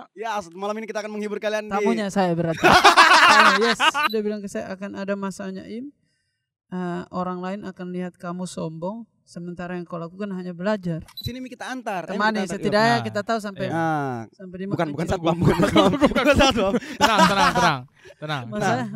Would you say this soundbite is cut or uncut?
cut